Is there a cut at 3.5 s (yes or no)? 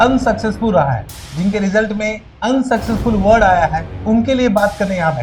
no